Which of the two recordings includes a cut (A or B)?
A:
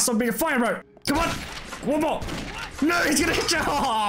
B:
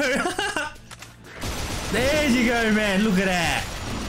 B